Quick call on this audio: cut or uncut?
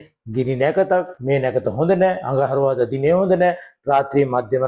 uncut